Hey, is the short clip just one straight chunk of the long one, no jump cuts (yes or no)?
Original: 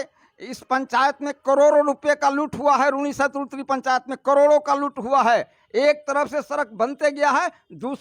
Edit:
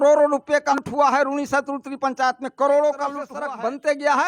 no